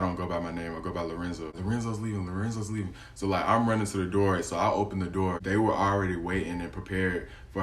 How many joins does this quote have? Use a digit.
2